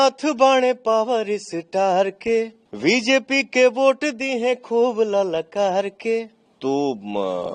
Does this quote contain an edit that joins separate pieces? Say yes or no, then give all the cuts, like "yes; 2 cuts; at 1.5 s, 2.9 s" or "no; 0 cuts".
yes; 2 cuts; at 2.6 s, 6.4 s